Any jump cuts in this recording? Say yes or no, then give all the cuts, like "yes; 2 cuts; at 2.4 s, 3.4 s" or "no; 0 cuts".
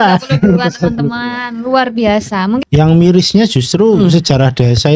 yes; 1 cut; at 2.6 s